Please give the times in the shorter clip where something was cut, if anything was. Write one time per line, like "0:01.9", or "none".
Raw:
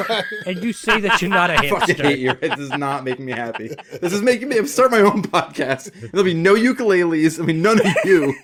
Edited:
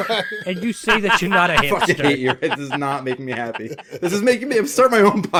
none